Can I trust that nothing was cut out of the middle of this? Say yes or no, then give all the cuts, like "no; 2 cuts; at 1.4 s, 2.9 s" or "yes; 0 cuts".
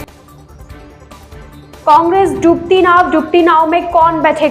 yes; 0 cuts